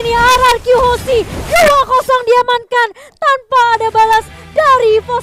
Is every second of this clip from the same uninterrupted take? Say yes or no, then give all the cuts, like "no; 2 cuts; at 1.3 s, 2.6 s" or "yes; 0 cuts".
yes; 0 cuts